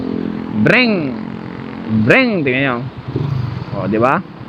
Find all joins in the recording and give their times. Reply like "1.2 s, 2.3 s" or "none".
none